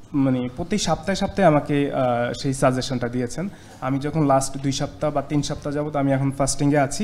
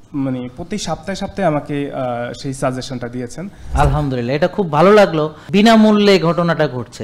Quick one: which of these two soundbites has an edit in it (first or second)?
second